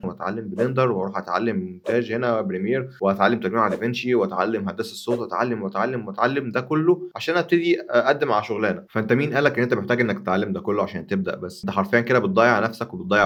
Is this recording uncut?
yes; 0 cuts

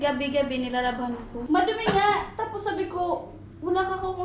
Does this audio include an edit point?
yes; 1 cut; at 1.3 s

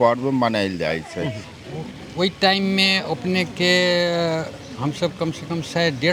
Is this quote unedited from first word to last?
no; 1 cut; at 1.4 s

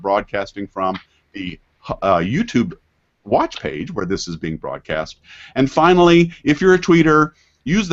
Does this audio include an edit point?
no; 0 cuts

